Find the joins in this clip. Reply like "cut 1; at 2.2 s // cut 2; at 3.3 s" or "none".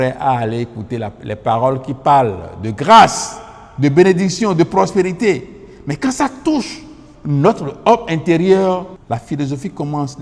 cut 1; at 9.0 s